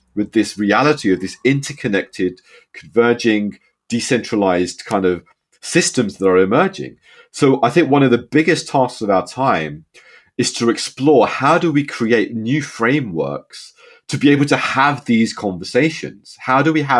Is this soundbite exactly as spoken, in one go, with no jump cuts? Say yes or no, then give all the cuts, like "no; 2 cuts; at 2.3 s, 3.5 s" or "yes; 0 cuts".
yes; 0 cuts